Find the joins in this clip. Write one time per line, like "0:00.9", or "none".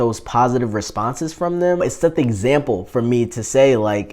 0:01.8